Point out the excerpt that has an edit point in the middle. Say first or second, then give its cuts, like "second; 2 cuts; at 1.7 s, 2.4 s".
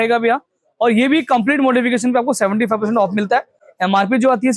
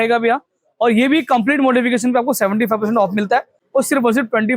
second; 1 cut; at 3.6 s